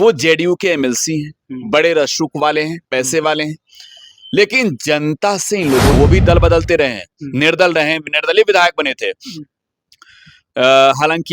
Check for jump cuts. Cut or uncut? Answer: cut